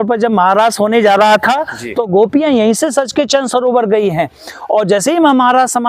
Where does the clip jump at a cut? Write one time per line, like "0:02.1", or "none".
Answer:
none